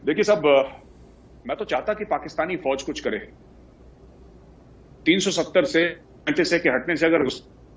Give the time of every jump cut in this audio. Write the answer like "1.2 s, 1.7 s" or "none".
none